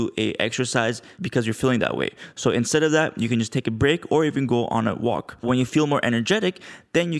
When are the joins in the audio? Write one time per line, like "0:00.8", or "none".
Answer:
0:01.1
0:05.4